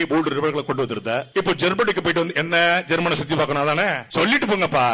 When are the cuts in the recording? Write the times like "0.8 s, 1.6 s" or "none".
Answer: 1.3 s, 4.0 s